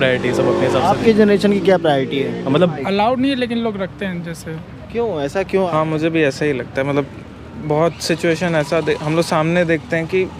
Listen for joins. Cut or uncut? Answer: cut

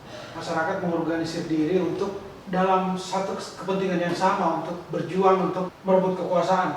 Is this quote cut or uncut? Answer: cut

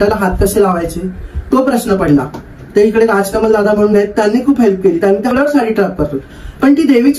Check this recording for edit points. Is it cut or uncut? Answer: cut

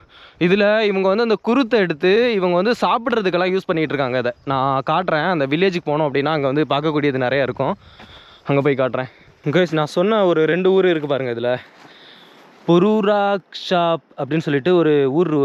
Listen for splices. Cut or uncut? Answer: uncut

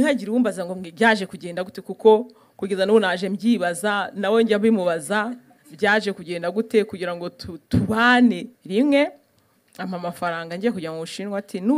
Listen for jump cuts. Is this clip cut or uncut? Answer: cut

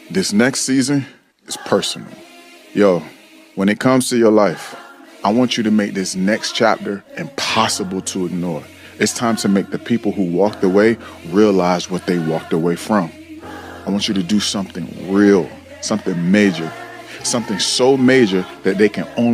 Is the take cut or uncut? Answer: uncut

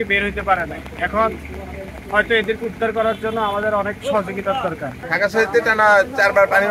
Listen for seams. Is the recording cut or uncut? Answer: cut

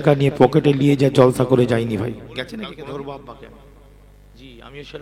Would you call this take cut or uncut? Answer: cut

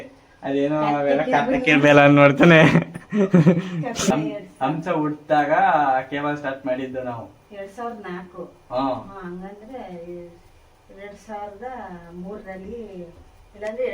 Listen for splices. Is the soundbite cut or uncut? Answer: cut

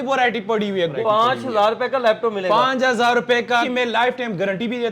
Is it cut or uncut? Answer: cut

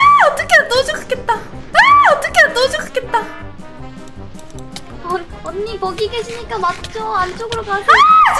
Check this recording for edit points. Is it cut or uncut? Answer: uncut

